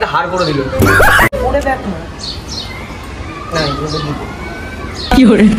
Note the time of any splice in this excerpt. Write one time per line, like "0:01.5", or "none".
0:01.3